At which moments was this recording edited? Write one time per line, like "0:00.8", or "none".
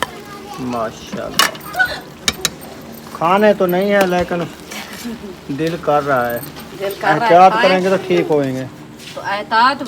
none